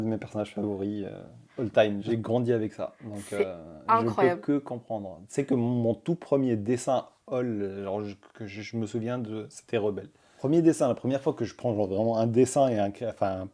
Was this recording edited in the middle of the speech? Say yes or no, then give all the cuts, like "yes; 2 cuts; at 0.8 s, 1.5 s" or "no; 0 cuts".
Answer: yes; 2 cuts; at 2.0 s, 10.4 s